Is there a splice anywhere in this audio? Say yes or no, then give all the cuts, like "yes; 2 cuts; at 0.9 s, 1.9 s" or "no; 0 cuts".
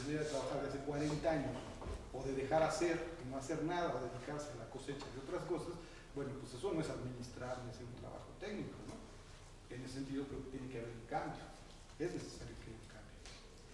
no; 0 cuts